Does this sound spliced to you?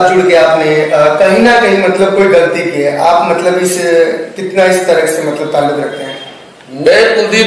no; 0 cuts

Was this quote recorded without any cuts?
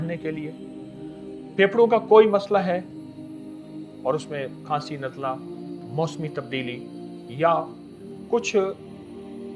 yes; 0 cuts

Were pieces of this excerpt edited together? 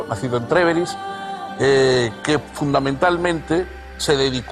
no; 0 cuts

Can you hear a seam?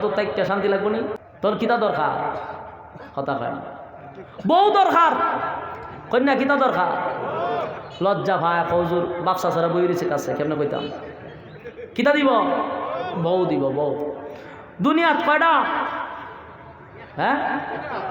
yes; 1 cut; at 1.2 s

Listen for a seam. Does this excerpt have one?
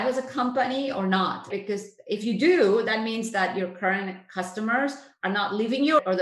no; 0 cuts

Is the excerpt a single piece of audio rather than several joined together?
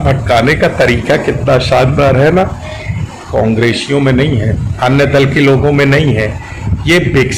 yes; 0 cuts

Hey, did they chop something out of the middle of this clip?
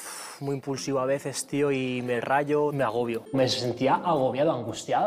no; 0 cuts

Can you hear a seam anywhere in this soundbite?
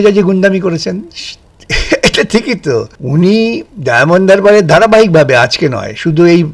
yes; 1 cut; at 3.0 s

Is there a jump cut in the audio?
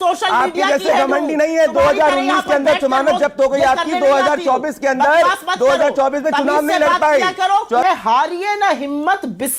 yes; 1 cut; at 7.8 s

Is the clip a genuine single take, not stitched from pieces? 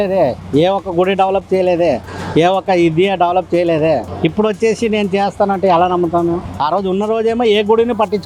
yes; 0 cuts

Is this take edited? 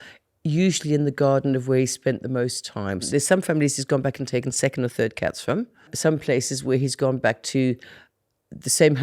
yes; 2 cuts; at 3.1 s, 5.9 s

